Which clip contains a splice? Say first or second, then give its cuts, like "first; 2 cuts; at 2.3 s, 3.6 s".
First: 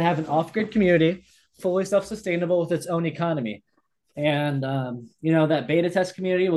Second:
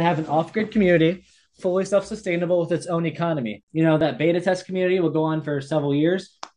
second; 1 cut; at 3.7 s